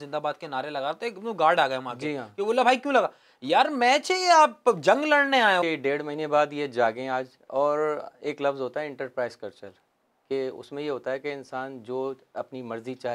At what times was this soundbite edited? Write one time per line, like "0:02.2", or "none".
0:05.6